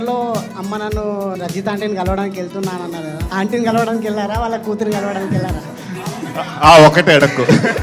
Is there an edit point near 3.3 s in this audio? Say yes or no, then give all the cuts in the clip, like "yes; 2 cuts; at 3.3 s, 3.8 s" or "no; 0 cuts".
yes; 2 cuts; at 1.3 s, 3.3 s